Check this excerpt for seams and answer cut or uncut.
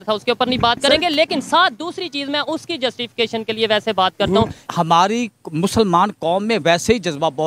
cut